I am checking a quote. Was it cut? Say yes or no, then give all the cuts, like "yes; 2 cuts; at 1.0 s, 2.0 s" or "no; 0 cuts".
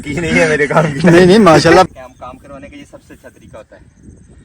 yes; 1 cut; at 1.9 s